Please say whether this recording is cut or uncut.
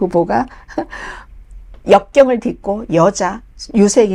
uncut